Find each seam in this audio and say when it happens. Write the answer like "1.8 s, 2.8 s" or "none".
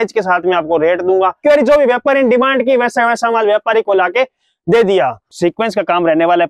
1.4 s, 5.3 s